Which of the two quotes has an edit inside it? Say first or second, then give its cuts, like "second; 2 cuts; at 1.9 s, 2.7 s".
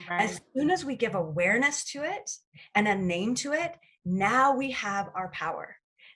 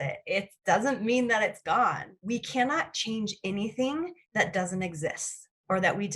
second; 1 cut; at 2.1 s